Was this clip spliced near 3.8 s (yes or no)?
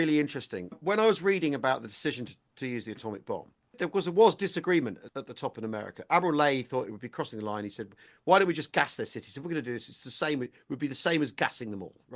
yes